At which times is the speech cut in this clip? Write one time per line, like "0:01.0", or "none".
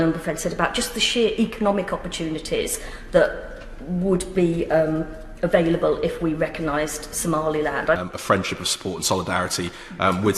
0:08.0